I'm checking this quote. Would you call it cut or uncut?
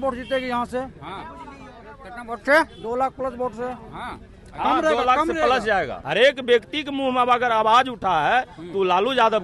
cut